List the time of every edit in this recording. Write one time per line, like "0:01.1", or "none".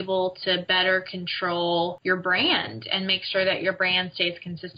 0:02.0